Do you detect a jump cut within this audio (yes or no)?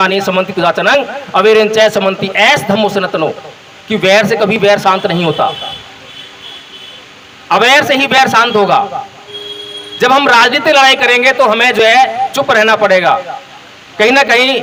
no